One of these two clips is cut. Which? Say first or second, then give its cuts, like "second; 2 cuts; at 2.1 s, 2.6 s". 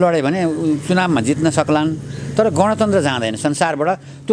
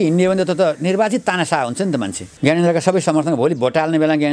second; 1 cut; at 2.2 s